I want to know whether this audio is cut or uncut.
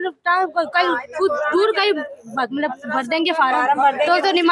uncut